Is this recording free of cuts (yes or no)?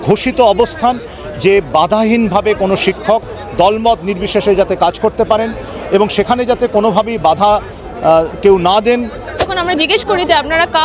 no